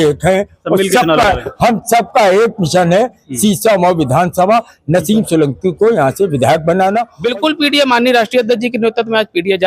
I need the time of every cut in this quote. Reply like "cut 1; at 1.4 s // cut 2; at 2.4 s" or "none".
cut 1; at 7.1 s